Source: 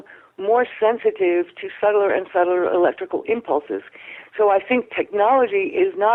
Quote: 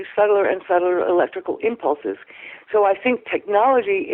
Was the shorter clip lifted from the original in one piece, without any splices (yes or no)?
yes